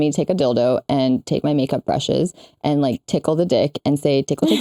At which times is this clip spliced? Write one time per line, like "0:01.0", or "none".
none